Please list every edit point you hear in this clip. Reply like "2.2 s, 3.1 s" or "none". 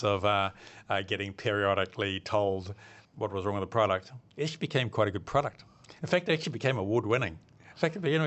none